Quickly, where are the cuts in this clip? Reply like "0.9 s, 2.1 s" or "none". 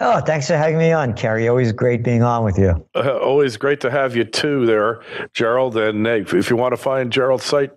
none

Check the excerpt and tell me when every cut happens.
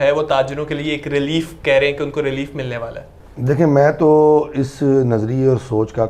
none

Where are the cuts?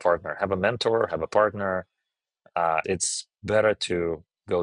2.8 s

